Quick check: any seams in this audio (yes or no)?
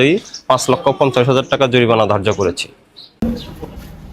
yes